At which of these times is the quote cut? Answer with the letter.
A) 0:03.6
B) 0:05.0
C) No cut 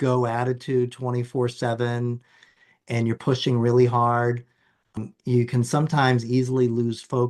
B